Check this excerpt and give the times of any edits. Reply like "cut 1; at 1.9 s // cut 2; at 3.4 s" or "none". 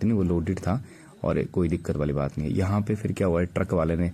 none